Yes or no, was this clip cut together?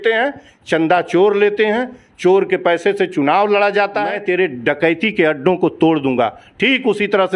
yes